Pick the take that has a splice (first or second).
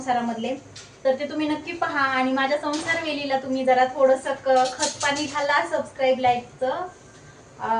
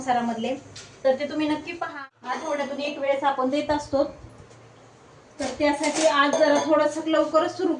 second